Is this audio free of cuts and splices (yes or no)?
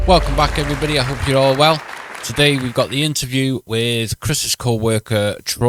yes